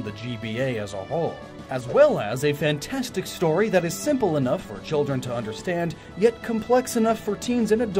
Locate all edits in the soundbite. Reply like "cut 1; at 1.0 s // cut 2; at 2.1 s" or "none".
cut 1; at 2.9 s